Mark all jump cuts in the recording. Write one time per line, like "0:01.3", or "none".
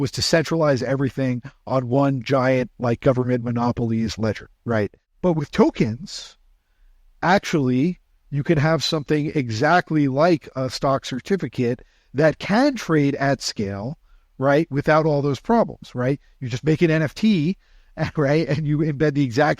0:05.0